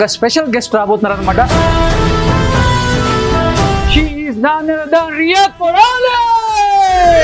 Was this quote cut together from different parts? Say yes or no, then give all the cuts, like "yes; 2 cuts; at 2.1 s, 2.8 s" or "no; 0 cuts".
yes; 2 cuts; at 1.5 s, 3.8 s